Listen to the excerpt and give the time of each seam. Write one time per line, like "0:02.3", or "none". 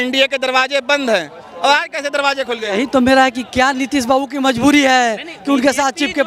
none